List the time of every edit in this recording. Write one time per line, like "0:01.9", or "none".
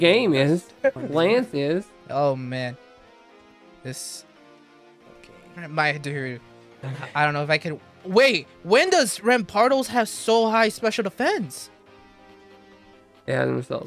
0:01.0
0:02.0

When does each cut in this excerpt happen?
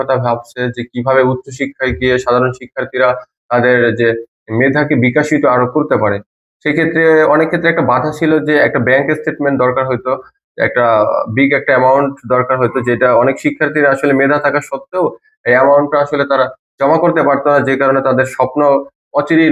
none

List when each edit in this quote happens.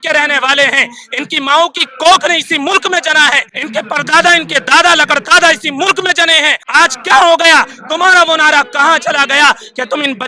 0:03.5
0:06.6

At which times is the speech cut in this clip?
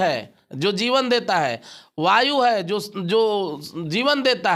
none

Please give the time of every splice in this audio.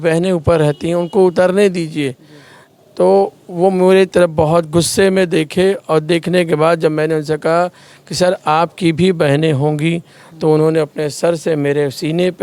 none

